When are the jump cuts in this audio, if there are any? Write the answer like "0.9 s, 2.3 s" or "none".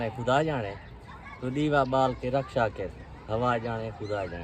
none